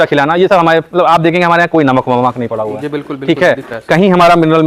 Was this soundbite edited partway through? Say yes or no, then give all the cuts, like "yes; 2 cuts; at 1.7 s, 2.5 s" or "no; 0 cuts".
no; 0 cuts